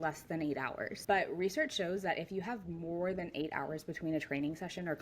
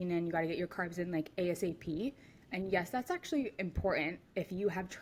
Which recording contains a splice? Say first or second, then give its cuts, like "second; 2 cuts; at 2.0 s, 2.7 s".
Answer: first; 1 cut; at 1.0 s